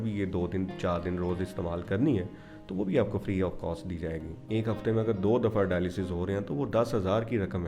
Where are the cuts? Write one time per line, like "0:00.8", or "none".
0:04.3